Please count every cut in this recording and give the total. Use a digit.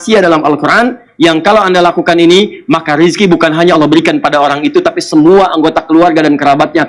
0